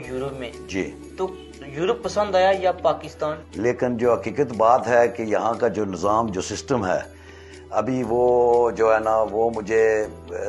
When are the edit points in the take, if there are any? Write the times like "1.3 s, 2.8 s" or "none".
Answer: 3.4 s